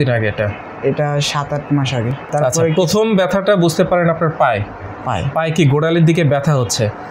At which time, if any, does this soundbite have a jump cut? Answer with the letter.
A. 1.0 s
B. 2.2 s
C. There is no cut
B